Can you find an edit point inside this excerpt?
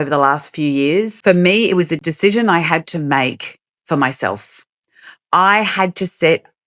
yes; 1 cut; at 1.1 s

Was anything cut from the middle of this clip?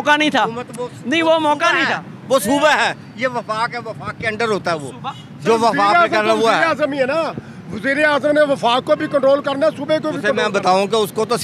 no; 0 cuts

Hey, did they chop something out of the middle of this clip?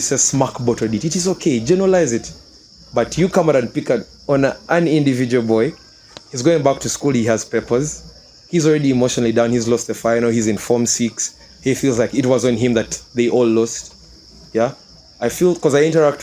no; 0 cuts

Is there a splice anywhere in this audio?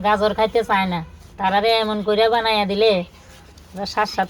no; 0 cuts

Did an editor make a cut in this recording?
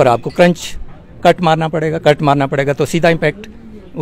no; 0 cuts

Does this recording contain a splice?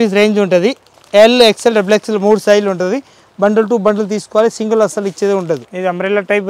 no; 0 cuts

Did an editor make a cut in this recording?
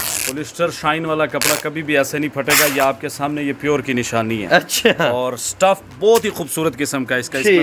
no; 0 cuts

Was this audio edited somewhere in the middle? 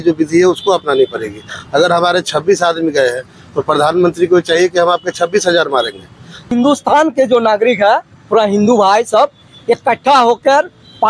yes; 1 cut; at 6.5 s

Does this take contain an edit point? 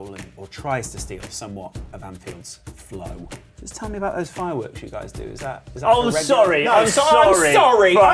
yes; 1 cut; at 3.4 s

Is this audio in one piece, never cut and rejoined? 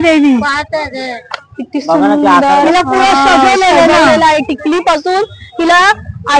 yes; 0 cuts

